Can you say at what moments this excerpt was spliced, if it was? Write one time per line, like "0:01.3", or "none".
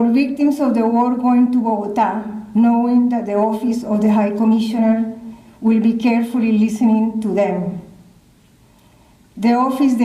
none